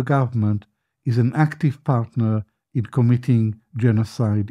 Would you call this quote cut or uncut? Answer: uncut